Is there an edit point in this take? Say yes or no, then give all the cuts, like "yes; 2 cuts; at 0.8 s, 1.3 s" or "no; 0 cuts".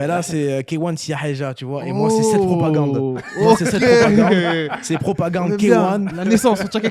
no; 0 cuts